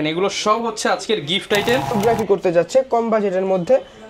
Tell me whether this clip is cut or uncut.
cut